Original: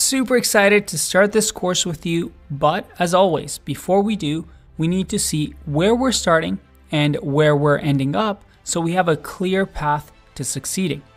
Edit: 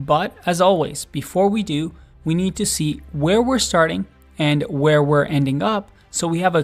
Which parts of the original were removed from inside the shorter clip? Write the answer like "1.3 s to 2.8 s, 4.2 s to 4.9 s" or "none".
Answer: none